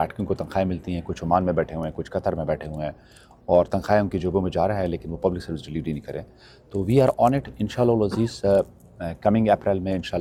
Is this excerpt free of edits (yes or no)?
yes